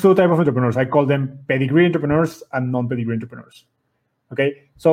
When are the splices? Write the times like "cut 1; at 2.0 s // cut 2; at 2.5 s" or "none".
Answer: none